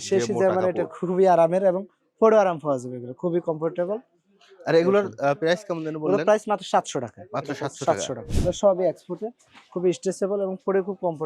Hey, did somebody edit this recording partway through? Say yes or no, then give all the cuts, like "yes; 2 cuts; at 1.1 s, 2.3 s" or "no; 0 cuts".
yes; 1 cut; at 8.2 s